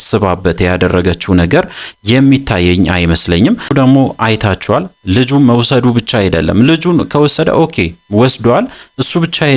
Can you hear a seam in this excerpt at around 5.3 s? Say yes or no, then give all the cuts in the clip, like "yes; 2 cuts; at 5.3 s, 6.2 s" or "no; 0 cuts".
no; 1 cut; at 3.7 s